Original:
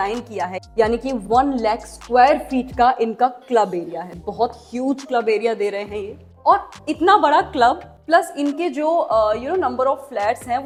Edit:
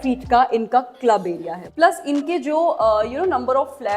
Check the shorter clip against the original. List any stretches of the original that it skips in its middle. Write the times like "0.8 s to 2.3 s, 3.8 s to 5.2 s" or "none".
4.1 s to 7.9 s